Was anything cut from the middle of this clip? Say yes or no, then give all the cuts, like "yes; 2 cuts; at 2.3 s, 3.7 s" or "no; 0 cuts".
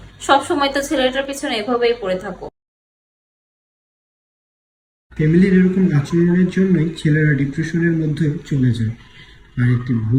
no; 0 cuts